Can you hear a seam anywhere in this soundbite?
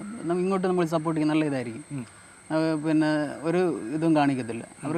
no; 0 cuts

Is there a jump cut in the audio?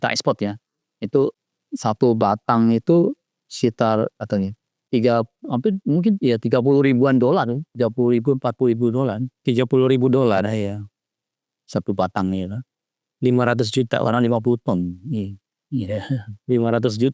yes; 1 cut; at 1.4 s

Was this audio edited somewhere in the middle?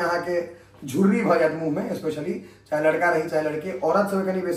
no; 0 cuts

